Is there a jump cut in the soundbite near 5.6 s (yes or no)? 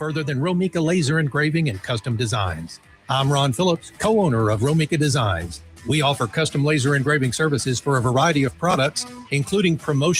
no